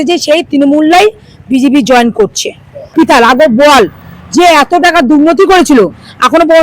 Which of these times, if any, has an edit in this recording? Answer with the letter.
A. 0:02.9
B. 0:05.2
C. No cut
A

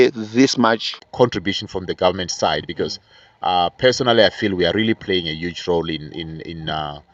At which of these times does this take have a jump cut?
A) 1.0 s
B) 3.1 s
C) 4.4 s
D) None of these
A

